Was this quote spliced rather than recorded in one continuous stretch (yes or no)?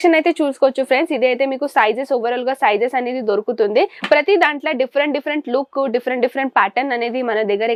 no